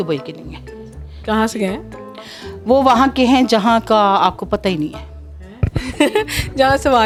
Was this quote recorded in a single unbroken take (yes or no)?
yes